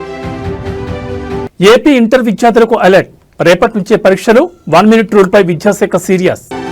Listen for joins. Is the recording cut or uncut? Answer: cut